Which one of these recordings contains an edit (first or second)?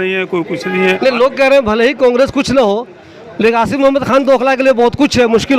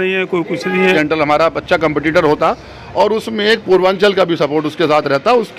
second